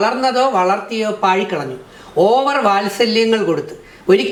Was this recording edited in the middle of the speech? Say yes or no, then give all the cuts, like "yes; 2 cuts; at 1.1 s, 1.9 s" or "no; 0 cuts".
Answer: no; 0 cuts